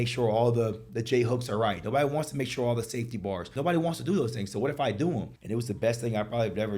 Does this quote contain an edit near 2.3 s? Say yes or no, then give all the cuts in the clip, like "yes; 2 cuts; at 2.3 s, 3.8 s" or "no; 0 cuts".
no; 2 cuts; at 3.5 s, 5.4 s